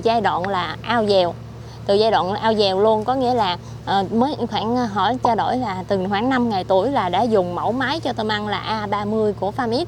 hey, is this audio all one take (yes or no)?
yes